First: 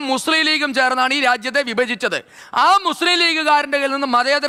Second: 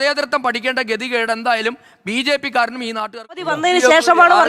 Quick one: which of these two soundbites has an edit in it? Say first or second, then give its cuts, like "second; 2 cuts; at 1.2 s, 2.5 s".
second; 1 cut; at 3.5 s